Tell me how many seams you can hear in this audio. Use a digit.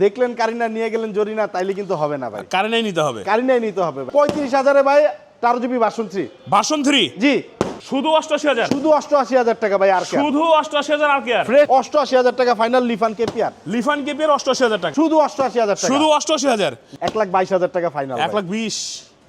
5